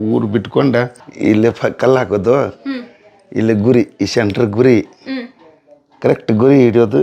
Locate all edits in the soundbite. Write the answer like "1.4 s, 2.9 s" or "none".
1.0 s